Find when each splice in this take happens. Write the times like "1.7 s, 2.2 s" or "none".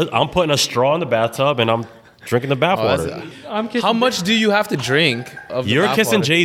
3.0 s

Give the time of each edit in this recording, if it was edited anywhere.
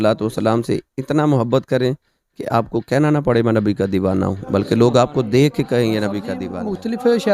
6.4 s

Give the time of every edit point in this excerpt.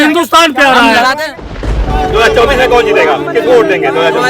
1.9 s

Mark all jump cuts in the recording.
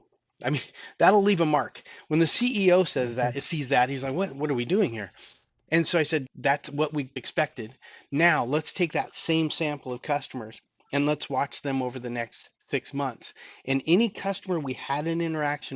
6.2 s, 7.2 s

